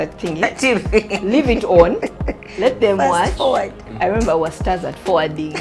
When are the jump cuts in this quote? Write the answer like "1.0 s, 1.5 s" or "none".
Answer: 3.8 s